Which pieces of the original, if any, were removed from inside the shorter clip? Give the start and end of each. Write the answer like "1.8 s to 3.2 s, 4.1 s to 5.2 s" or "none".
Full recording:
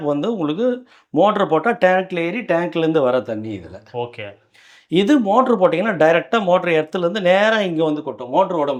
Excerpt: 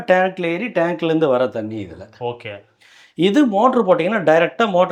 none